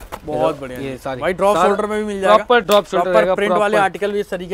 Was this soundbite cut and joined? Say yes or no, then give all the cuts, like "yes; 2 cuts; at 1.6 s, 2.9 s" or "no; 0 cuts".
no; 0 cuts